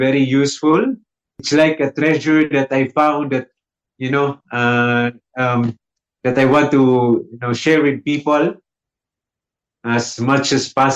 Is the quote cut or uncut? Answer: cut